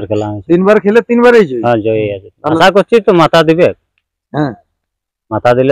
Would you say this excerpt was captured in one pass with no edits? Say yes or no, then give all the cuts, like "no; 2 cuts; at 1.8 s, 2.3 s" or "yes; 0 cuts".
no; 1 cut; at 2.6 s